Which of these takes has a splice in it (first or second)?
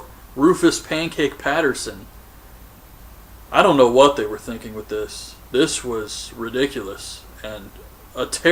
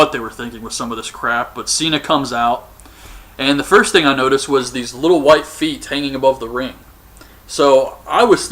second